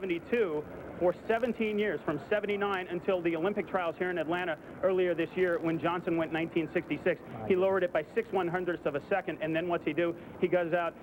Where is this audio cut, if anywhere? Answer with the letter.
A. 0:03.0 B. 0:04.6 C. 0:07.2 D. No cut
D